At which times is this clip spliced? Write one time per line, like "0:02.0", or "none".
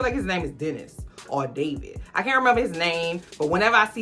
none